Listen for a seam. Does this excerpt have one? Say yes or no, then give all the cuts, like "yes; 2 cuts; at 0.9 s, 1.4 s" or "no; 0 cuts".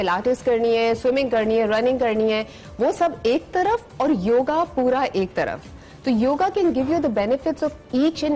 no; 0 cuts